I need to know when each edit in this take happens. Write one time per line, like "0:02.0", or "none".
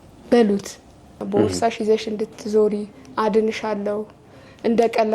0:01.1